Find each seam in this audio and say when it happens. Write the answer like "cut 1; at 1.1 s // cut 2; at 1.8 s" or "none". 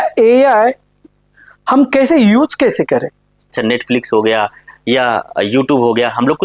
cut 1; at 3.5 s